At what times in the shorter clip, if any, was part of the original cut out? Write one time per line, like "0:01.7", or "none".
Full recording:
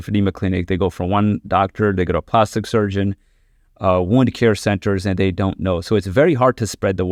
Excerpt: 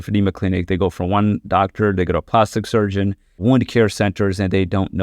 0:03.4